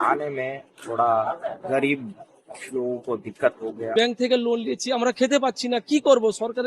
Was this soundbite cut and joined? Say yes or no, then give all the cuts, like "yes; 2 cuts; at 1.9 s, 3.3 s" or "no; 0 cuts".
yes; 1 cut; at 3.8 s